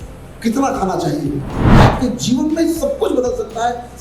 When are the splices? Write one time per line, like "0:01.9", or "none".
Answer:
0:01.7